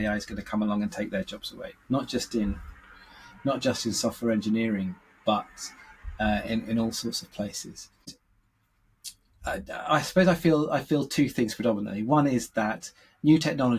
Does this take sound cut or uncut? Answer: uncut